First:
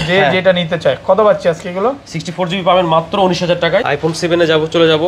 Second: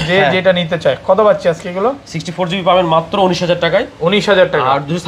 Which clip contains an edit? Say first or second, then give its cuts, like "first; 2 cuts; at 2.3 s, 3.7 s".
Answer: first; 1 cut; at 3.9 s